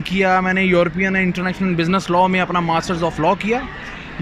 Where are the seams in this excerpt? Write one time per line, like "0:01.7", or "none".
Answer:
none